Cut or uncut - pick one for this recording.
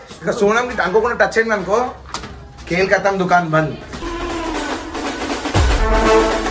uncut